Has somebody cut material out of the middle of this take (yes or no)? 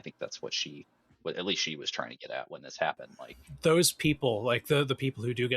yes